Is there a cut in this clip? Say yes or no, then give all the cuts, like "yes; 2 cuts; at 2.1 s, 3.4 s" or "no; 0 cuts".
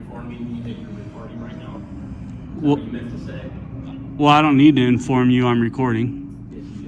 no; 0 cuts